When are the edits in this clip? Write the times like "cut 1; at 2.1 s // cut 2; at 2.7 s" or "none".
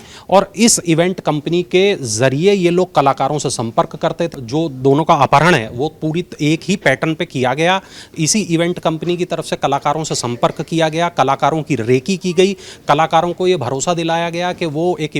cut 1; at 4.3 s